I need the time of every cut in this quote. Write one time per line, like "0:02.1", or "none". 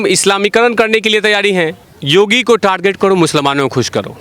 0:01.8